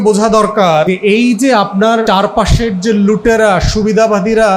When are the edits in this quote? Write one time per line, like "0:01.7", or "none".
0:00.9
0:02.0